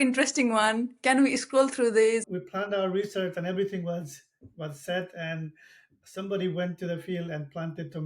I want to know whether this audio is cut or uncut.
cut